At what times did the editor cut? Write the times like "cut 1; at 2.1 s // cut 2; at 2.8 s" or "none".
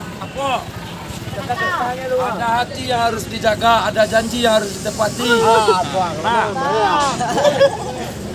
none